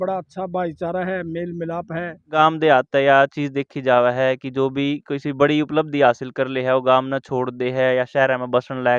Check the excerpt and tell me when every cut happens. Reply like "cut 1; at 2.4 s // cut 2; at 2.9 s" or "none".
cut 1; at 2.4 s